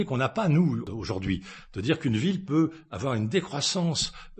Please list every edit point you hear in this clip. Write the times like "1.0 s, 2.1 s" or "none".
0.9 s